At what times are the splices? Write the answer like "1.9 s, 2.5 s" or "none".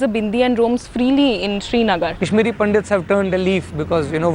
2.2 s